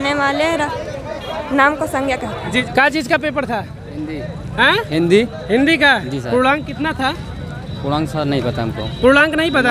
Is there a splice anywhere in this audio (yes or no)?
yes